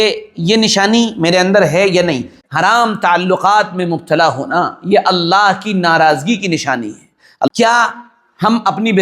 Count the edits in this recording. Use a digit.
2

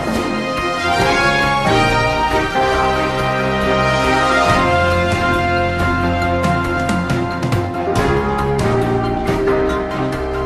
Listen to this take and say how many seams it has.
0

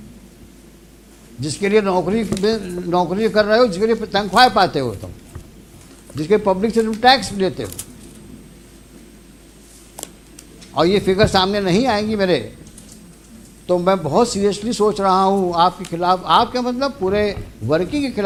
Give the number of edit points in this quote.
0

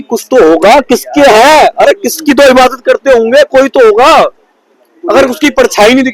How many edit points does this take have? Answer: 0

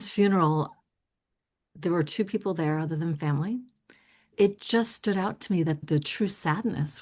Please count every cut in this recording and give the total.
1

